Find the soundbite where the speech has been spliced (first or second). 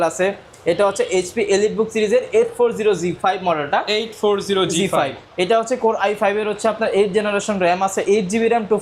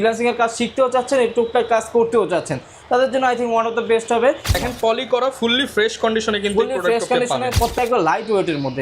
second